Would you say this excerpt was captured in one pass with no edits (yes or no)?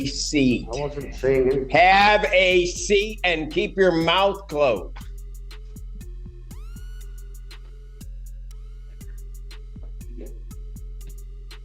yes